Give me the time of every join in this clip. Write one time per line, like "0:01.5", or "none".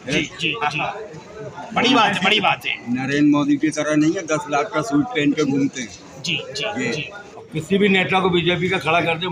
0:07.5